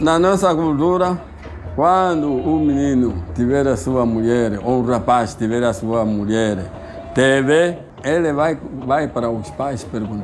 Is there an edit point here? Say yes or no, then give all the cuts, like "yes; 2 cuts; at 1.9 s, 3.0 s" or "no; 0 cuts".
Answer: yes; 1 cut; at 7.9 s